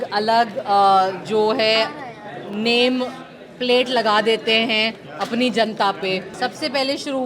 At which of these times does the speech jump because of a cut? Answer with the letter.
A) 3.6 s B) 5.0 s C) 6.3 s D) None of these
C